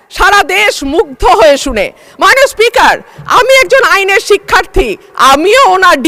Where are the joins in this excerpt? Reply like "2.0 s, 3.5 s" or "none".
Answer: none